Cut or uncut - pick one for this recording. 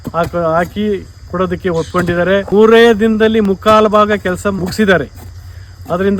cut